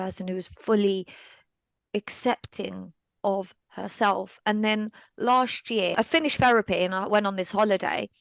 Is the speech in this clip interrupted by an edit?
yes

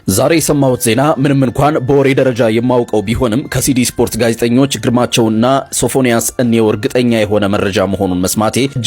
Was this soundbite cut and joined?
no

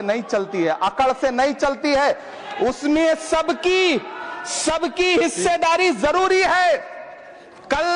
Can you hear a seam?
no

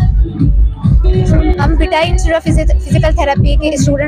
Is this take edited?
no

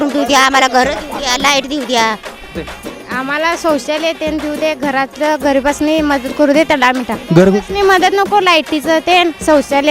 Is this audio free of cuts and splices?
no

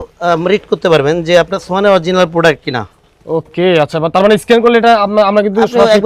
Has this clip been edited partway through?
no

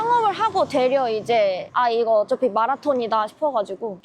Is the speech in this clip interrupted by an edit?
no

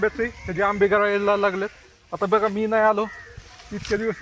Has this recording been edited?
no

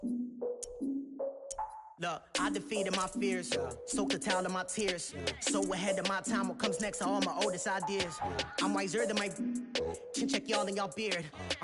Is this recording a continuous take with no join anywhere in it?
no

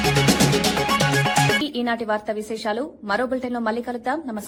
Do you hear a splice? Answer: no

